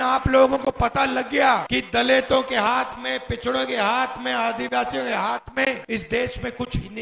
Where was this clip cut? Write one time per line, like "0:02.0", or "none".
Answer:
0:01.7
0:05.8